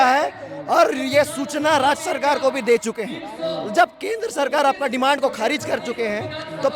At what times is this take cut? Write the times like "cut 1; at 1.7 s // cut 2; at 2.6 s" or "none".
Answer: none